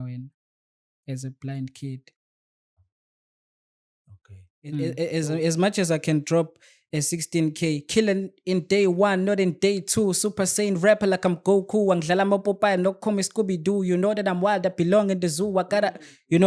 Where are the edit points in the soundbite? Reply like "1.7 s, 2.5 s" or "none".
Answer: 4.8 s